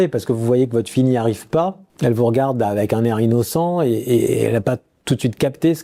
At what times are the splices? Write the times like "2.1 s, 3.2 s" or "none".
none